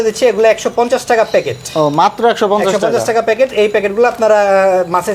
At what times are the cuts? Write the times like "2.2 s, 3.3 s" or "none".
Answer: none